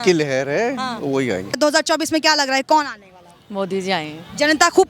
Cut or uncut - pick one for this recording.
cut